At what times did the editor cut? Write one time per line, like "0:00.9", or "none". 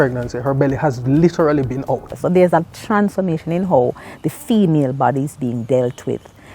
0:02.2